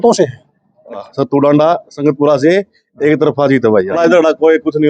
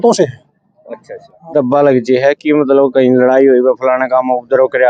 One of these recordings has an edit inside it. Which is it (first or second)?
first